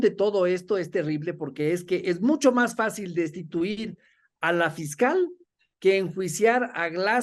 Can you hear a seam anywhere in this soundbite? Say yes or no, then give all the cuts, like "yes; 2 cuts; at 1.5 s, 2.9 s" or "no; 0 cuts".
no; 0 cuts